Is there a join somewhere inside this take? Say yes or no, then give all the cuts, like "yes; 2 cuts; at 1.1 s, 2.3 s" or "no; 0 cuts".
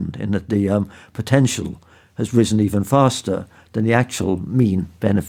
no; 0 cuts